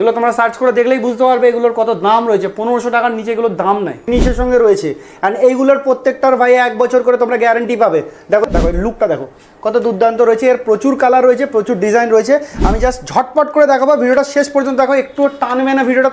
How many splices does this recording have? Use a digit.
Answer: 2